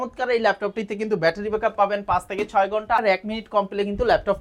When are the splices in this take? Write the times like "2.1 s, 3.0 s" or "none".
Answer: 3.0 s